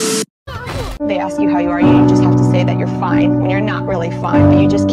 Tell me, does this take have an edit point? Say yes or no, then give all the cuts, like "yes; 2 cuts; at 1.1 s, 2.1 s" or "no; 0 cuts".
yes; 1 cut; at 0.9 s